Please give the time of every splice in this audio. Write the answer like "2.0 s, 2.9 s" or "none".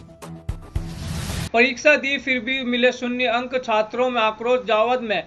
1.4 s